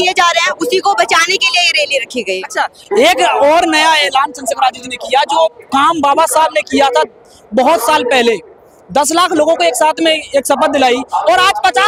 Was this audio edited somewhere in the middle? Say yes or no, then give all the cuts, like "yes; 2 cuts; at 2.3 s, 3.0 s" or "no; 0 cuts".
no; 0 cuts